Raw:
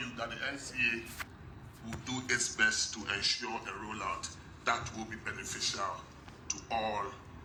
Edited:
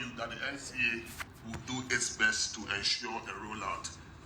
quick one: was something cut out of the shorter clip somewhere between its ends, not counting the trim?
yes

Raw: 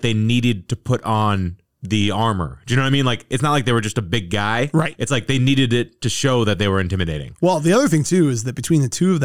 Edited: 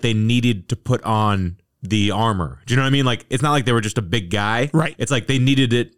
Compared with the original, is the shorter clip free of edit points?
yes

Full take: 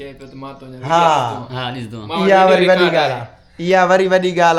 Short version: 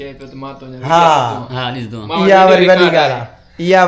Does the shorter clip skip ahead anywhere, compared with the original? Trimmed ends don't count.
no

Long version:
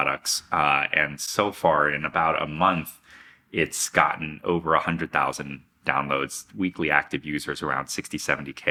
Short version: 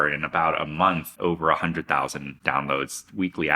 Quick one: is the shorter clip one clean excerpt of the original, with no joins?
no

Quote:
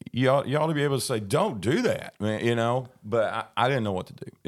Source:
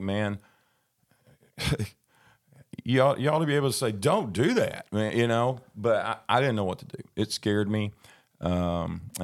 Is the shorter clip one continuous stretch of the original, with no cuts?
yes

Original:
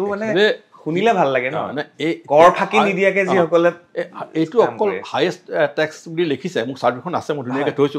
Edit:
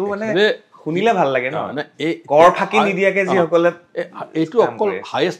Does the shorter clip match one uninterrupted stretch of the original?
yes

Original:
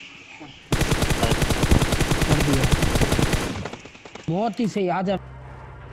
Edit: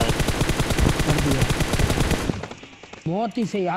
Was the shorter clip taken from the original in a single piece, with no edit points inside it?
yes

